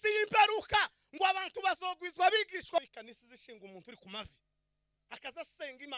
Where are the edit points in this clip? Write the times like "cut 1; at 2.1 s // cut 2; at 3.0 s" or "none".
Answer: cut 1; at 2.8 s